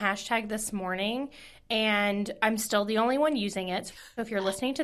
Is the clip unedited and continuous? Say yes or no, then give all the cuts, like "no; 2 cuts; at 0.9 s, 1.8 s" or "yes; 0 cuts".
yes; 0 cuts